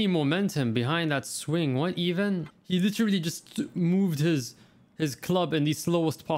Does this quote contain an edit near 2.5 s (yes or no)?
yes